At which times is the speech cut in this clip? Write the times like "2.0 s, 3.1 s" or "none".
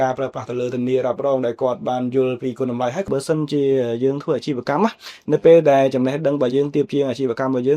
3.1 s